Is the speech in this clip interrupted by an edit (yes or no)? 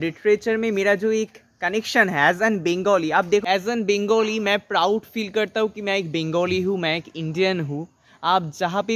yes